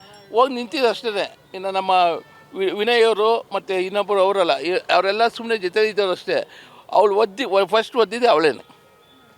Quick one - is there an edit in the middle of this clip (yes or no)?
no